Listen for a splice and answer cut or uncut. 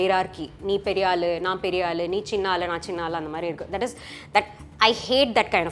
uncut